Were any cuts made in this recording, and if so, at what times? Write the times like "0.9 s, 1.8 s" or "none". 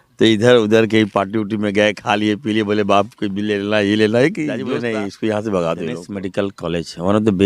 4.6 s, 6.2 s